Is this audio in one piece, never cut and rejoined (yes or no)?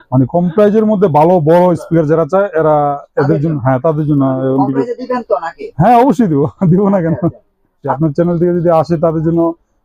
no